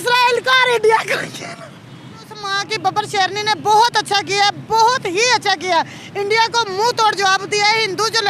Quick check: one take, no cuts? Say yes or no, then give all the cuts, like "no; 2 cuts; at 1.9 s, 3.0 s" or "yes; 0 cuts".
no; 1 cut; at 2.4 s